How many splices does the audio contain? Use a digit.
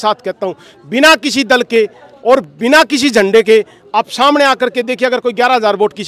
0